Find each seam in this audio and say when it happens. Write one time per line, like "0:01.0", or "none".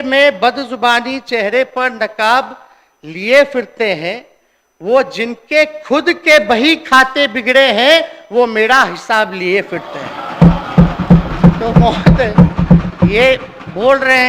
none

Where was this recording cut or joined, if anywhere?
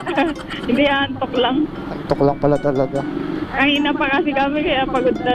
0:01.9

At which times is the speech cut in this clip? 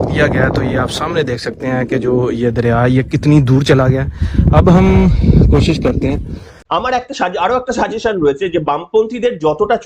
0:06.5

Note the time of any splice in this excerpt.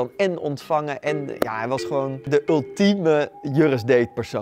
0:02.3
0:03.4

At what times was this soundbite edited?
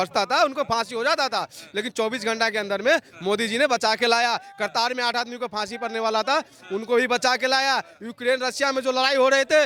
none

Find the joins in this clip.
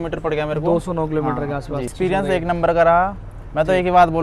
0:01.8

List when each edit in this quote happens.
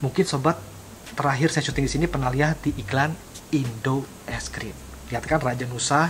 none

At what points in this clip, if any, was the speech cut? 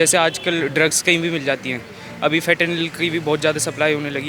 none

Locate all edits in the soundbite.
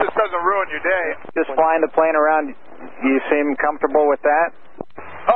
0:01.2

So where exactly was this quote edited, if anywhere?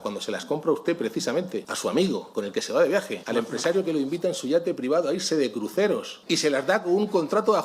0:01.7
0:02.3
0:03.2
0:06.1

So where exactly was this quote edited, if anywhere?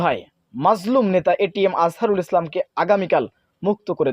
none

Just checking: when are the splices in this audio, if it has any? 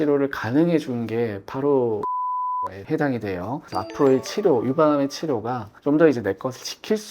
0:02.3
0:03.6

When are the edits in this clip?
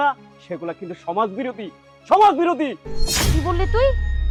none

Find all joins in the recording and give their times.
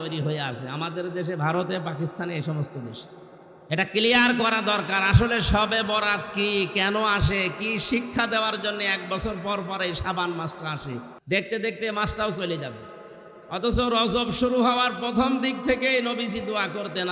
0:11.1

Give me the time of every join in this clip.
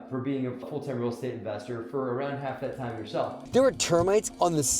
0:03.4

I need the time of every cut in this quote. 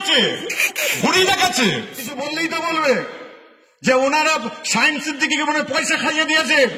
0:02.2

